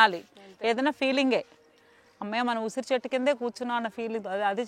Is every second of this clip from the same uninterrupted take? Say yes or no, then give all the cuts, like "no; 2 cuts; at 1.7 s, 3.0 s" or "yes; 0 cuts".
yes; 0 cuts